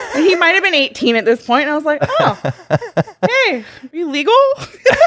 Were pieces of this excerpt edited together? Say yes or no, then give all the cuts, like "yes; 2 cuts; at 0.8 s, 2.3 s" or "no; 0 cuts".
yes; 1 cut; at 3.8 s